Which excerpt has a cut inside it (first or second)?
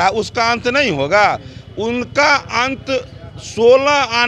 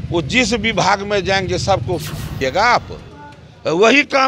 second